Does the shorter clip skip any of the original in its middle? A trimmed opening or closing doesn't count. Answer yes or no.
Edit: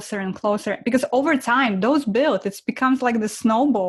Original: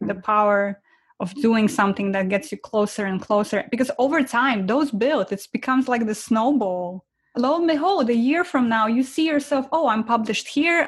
no